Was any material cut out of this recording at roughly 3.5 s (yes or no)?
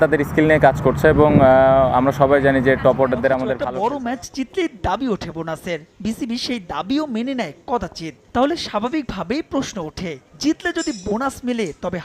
yes